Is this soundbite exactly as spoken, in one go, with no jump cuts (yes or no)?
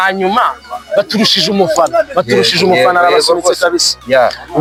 yes